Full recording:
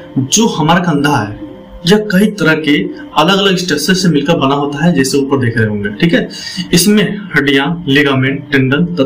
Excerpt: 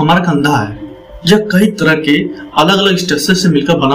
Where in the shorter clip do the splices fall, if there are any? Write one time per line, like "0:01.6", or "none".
none